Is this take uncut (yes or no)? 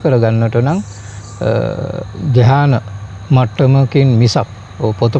yes